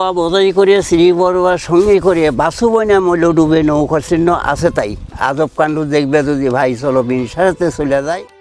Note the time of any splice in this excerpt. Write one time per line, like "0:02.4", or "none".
none